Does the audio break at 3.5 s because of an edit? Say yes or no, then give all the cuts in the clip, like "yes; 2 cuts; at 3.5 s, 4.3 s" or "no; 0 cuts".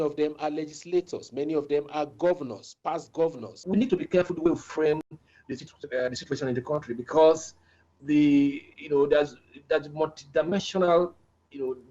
yes; 1 cut; at 3.5 s